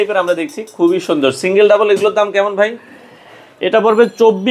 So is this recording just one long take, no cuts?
yes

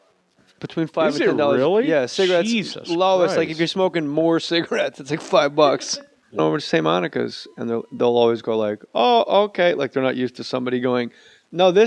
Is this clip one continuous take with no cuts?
yes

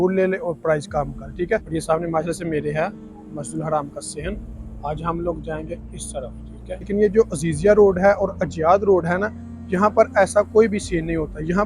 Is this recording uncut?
no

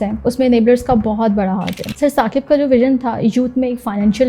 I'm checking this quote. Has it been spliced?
yes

